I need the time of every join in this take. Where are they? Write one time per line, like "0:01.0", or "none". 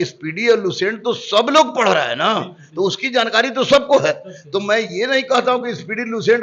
none